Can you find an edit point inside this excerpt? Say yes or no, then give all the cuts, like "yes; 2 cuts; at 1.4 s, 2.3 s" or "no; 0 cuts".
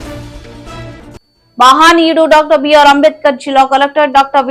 yes; 1 cut; at 1.1 s